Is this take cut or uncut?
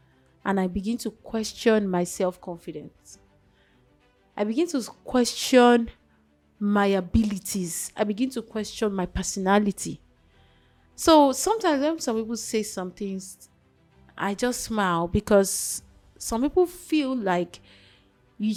uncut